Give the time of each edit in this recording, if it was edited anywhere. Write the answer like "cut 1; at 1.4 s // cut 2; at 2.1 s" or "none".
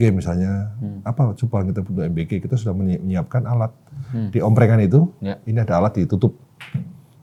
none